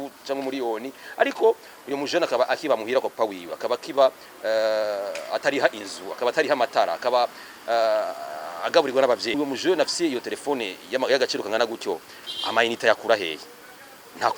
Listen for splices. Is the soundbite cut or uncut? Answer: cut